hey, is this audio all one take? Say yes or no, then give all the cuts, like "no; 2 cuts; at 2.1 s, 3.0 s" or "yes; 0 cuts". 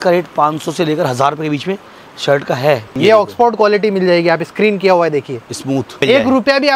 no; 2 cuts; at 2.9 s, 6.0 s